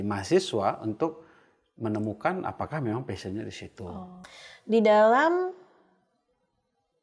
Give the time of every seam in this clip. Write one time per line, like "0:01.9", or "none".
0:04.2